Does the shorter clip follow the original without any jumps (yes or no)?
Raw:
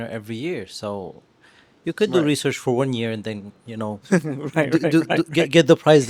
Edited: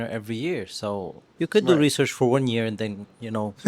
no